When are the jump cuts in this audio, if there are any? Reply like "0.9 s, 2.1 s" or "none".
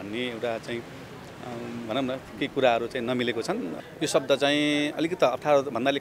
3.8 s